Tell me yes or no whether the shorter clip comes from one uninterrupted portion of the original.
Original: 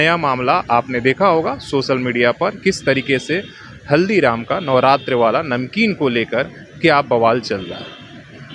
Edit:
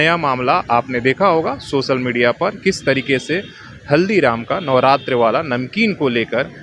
yes